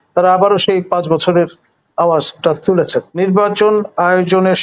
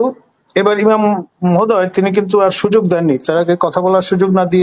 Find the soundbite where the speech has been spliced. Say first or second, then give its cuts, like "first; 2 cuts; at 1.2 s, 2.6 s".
first; 1 cut; at 3.1 s